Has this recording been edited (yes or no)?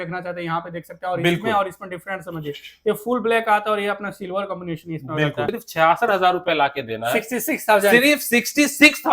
yes